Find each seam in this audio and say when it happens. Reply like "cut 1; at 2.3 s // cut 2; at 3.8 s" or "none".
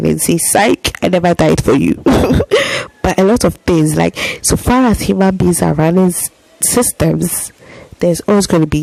none